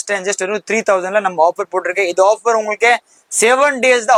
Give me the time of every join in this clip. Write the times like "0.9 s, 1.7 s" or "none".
none

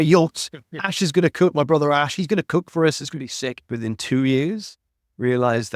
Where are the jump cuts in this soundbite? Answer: 3.6 s

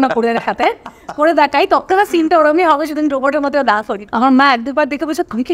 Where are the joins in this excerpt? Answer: 4.0 s

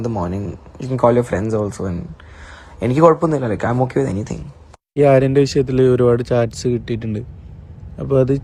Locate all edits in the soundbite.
5.0 s

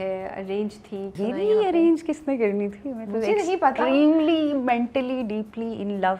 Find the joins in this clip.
1.2 s

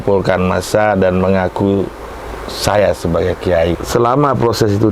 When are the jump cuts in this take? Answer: 3.8 s

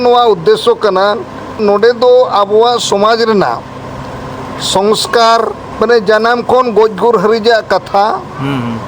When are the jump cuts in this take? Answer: 1.6 s, 5.6 s

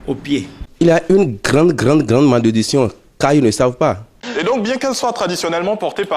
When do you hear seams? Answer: 1.1 s, 4.2 s

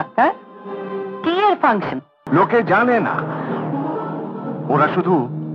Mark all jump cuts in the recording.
2.2 s

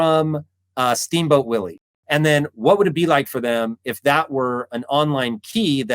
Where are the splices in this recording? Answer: 1.8 s

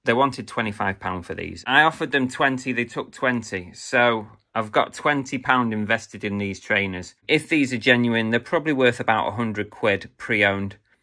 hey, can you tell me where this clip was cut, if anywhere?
1.5 s, 7.2 s

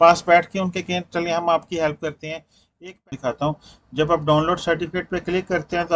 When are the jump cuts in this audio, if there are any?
3.1 s

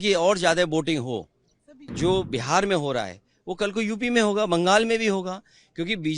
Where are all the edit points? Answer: 1.9 s

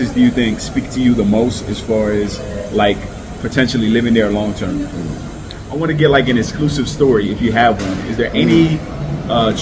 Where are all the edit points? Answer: 5.6 s

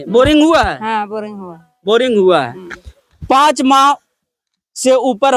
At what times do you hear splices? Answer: none

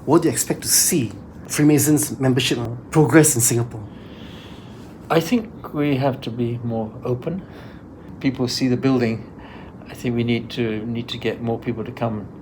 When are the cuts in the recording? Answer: 1.5 s, 2.7 s, 8.1 s

